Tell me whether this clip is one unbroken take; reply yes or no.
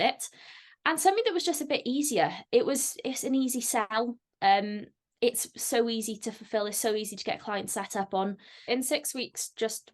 no